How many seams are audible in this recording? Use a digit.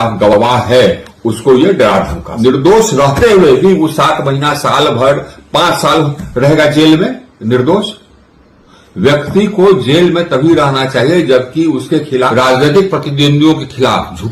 2